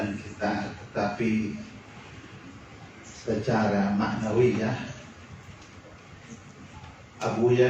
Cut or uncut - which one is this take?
uncut